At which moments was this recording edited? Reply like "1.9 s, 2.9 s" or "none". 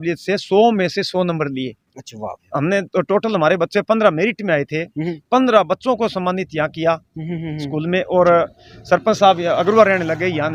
none